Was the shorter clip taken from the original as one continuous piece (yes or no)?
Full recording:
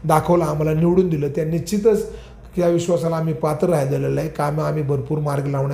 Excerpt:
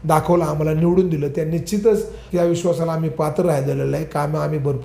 no